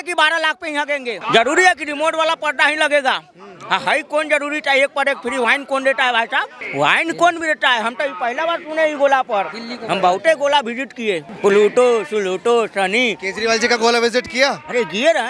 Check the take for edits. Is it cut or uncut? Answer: cut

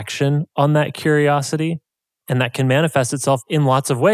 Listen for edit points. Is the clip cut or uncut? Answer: uncut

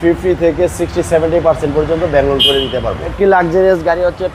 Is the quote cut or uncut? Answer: cut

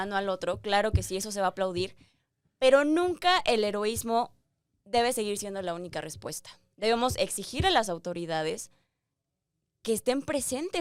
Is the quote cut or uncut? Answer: uncut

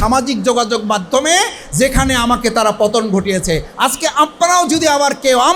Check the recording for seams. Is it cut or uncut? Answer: uncut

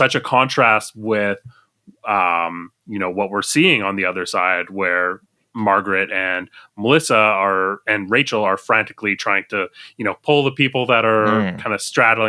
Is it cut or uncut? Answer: uncut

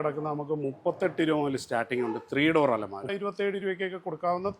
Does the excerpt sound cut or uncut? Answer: cut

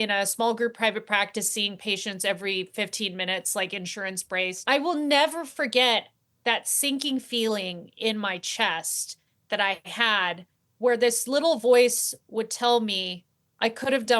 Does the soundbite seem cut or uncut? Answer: cut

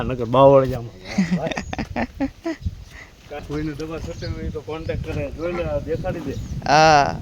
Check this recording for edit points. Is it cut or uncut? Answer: cut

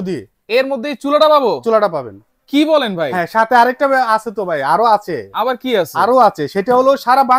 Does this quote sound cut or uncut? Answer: uncut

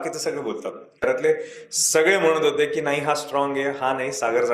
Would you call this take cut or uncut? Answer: cut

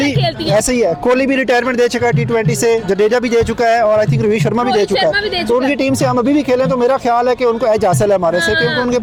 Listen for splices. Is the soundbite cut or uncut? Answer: uncut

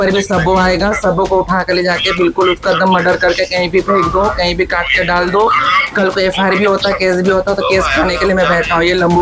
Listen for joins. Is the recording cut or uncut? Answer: uncut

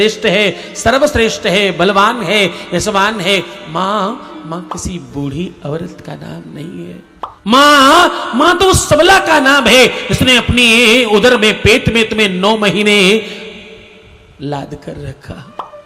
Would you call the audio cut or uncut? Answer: cut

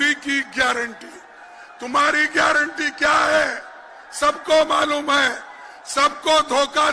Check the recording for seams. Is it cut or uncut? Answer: uncut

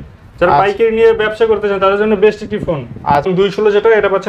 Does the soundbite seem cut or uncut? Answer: cut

